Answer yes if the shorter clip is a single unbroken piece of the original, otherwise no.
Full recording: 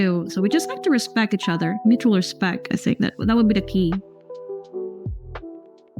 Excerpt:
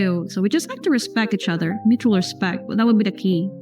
no